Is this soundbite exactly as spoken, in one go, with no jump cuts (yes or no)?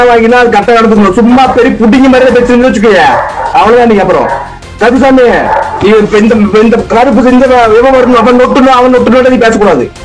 yes